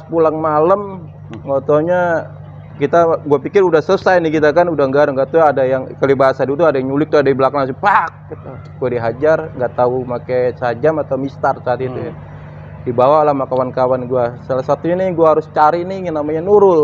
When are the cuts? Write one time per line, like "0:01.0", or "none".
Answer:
none